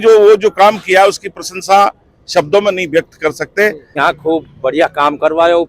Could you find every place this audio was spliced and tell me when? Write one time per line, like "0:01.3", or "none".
0:03.8